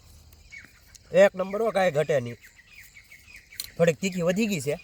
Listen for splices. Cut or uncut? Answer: uncut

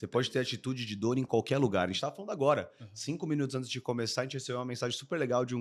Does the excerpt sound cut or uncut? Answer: uncut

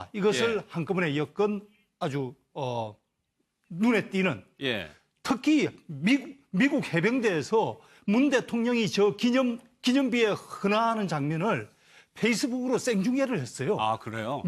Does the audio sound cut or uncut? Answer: uncut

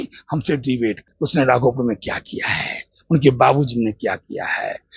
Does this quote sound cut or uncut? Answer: cut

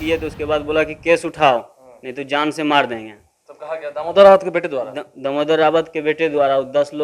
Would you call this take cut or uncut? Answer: uncut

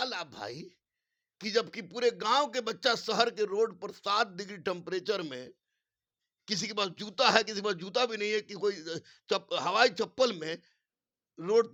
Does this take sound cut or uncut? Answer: uncut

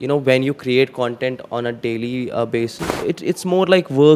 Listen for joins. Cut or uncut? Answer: cut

